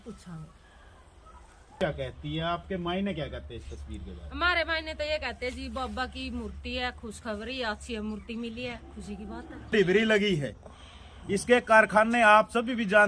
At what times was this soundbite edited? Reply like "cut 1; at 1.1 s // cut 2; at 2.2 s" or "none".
cut 1; at 1.7 s // cut 2; at 9.7 s